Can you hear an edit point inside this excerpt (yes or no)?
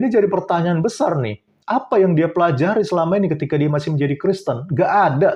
no